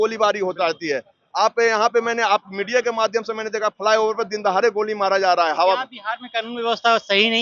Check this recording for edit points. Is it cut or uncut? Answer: uncut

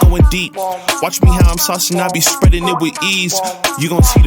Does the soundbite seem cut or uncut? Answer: uncut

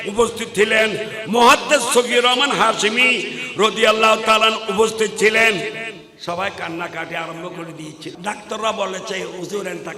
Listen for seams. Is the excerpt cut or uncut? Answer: cut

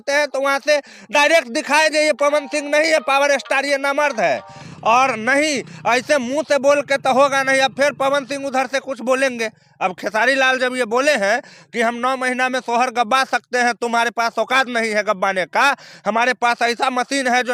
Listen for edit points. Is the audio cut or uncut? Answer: uncut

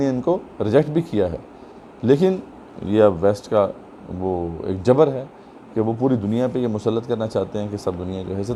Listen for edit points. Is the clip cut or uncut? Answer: uncut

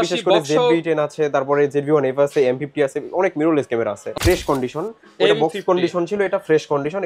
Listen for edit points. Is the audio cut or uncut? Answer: cut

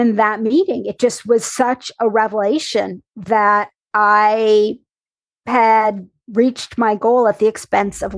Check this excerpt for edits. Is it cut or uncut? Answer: uncut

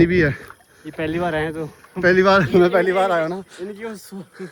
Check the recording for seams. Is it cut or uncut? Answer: uncut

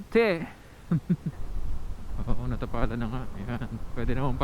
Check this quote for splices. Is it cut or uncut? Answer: cut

